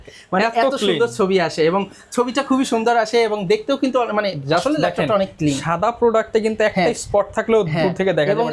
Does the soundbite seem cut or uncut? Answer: uncut